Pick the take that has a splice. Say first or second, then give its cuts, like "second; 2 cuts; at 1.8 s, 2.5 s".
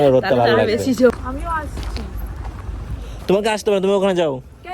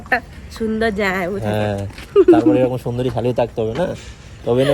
first; 1 cut; at 1.1 s